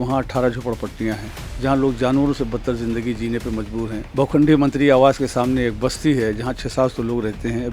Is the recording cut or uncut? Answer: cut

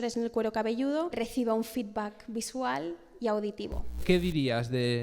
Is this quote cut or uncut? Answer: cut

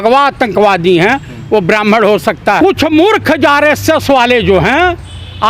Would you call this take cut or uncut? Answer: cut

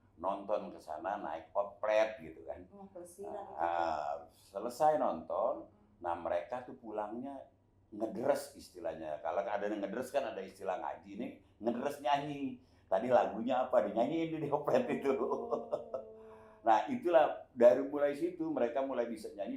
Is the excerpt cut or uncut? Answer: uncut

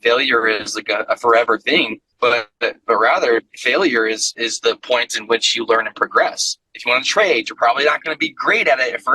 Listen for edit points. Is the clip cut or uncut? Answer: cut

